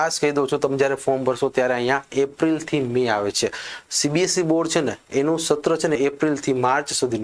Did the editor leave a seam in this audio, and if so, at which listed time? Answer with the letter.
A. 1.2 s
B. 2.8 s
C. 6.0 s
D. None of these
C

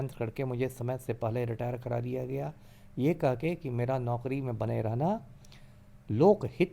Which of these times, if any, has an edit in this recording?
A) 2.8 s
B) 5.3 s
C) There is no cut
C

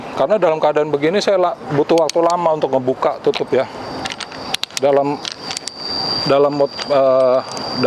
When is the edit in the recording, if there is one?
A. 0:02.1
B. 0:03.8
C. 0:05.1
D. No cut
D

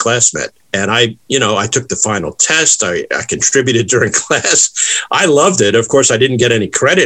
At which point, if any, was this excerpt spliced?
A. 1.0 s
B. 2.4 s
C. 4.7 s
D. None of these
A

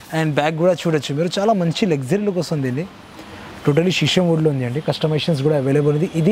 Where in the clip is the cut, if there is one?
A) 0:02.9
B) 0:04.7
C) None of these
C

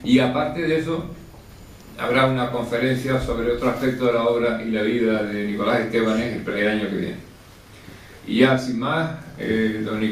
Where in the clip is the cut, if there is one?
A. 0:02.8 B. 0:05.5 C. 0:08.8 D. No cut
A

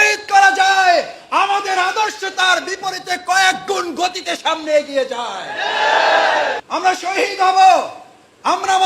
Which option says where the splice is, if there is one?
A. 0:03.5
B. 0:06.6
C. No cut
B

